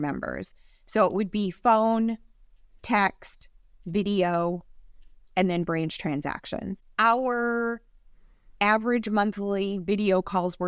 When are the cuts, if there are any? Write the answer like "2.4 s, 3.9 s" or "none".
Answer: 6.8 s